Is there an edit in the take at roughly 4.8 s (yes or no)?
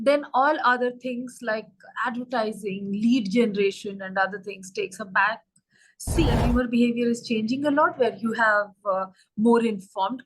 no